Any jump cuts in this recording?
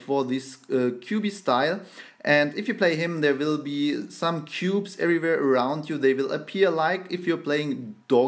no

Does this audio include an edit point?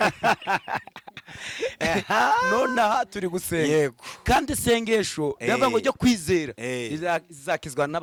no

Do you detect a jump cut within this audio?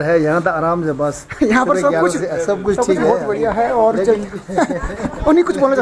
no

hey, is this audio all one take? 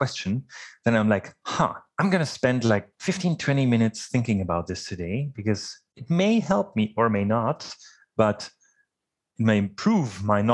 no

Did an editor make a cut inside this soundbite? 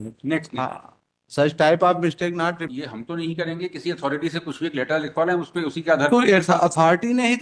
yes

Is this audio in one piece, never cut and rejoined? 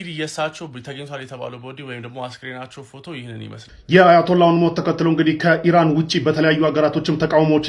no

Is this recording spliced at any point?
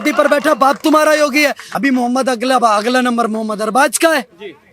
yes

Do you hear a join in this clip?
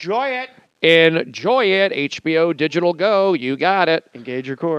yes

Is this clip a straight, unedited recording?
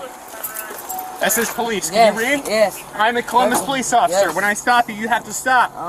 yes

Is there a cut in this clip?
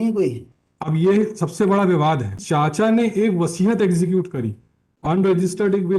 yes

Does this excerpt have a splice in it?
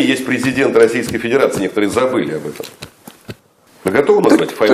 yes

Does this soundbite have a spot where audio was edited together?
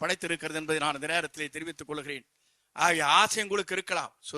no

